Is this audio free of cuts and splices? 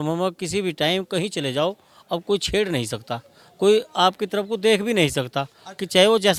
yes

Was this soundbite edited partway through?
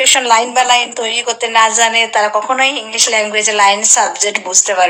no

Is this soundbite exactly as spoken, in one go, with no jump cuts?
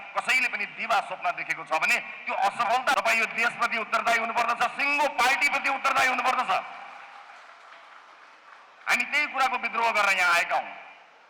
no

